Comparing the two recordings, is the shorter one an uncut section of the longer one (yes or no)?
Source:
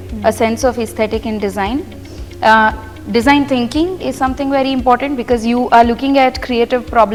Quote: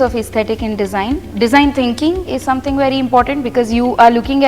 no